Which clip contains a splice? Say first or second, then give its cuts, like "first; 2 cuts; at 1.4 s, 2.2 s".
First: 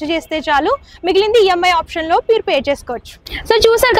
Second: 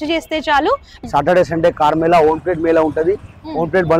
second; 1 cut; at 0.9 s